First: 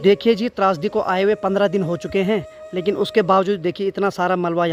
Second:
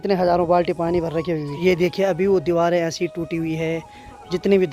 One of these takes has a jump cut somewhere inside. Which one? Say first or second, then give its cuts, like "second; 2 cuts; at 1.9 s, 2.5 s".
second; 1 cut; at 1.5 s